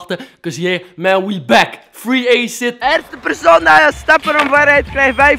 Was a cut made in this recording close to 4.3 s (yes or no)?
no